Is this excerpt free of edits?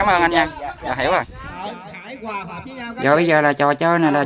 no; 2 cuts; at 1.6 s, 3.0 s

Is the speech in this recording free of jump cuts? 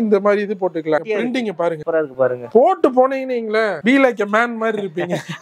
no; 1 cut; at 1.1 s

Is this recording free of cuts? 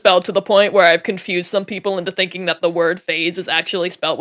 yes; 0 cuts

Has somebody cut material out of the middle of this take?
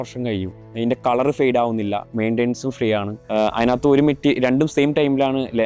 yes; 1 cut; at 3.2 s

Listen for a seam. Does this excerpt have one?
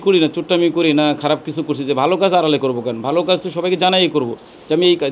no; 0 cuts

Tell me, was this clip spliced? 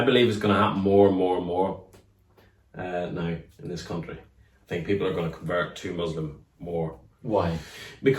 no; 0 cuts

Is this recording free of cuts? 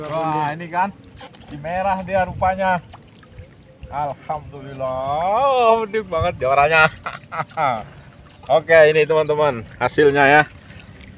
yes; 0 cuts

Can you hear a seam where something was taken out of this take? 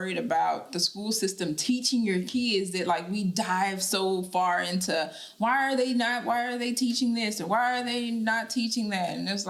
no; 0 cuts

